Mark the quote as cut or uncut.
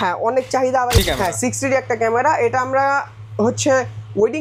cut